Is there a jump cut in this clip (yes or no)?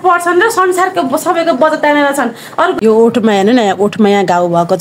yes